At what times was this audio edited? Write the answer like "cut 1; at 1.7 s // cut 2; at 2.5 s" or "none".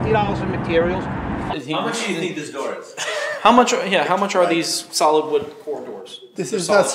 cut 1; at 1.6 s